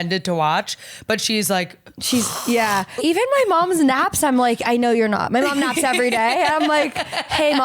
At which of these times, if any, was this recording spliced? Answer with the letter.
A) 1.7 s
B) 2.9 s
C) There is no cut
B